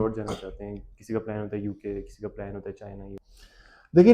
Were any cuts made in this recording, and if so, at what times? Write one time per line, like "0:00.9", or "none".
0:03.2

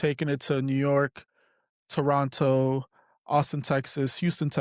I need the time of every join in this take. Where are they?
none

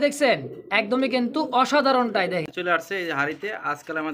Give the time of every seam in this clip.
0:02.5

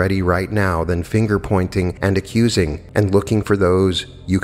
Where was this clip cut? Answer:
0:01.9
0:02.8

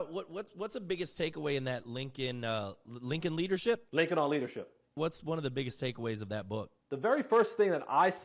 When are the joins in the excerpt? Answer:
0:03.9
0:04.9
0:06.8

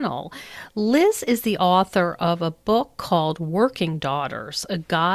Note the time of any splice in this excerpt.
none

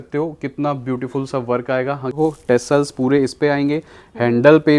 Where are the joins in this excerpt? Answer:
0:02.1

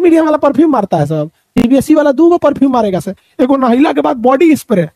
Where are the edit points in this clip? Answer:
none

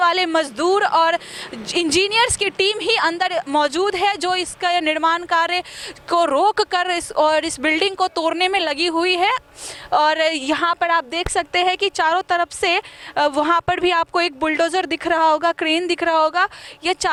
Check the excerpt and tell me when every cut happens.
none

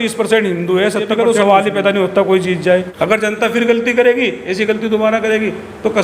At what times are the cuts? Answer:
0:01.1
0:02.9

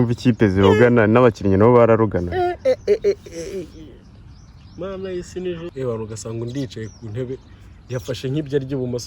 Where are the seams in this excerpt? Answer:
0:05.7

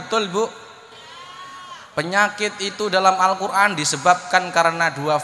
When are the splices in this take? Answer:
none

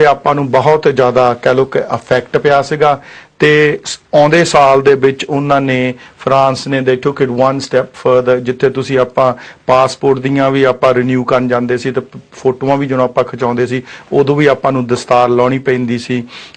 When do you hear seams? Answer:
0:10.2

